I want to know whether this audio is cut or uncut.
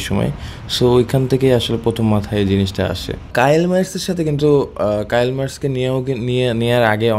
cut